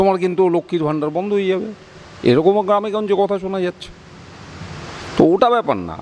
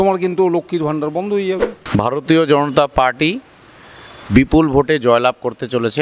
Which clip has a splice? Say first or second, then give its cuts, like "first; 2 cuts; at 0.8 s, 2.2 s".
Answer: second; 1 cut; at 1.8 s